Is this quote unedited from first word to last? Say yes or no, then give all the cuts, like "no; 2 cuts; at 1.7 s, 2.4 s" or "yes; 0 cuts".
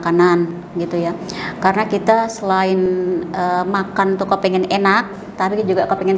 yes; 0 cuts